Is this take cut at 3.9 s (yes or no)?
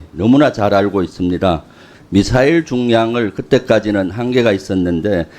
no